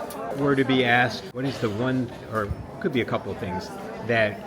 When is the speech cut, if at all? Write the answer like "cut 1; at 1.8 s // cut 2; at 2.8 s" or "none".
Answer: cut 1; at 1.2 s